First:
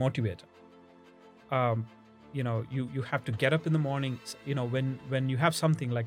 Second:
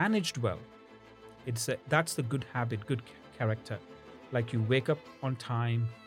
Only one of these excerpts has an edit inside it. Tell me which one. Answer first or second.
first